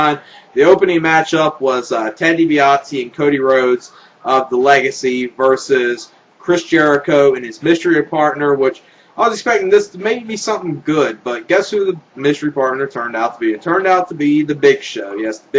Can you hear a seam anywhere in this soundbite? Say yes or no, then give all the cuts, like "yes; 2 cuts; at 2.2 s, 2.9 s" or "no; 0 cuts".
yes; 1 cut; at 11.3 s